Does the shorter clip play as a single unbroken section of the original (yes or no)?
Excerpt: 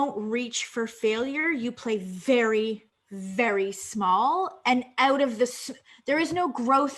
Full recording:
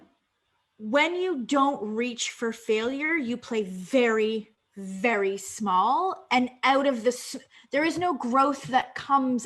yes